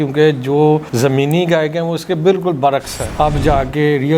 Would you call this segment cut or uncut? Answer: cut